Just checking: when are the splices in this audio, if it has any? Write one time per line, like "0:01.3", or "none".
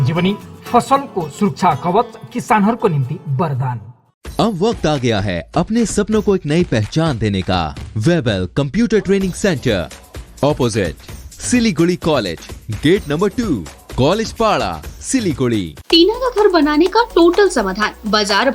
0:07.8
0:15.8